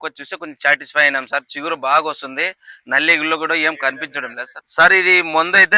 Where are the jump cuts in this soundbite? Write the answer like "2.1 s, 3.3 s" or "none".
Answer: 4.6 s

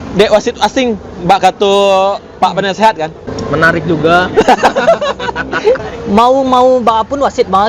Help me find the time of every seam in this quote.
3.3 s, 5.9 s

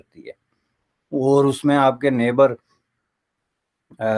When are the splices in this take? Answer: none

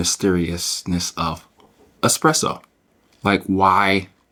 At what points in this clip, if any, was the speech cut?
none

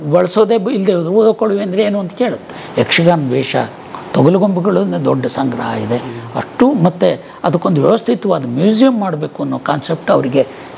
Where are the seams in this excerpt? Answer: 2.6 s

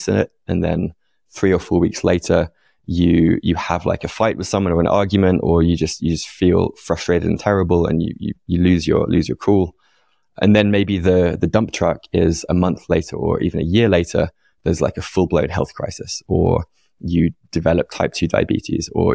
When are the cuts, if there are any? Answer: none

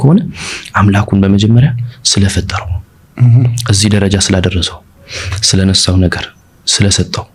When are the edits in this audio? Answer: none

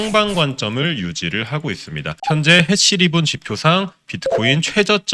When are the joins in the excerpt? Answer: 2.2 s

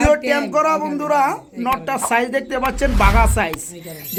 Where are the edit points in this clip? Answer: none

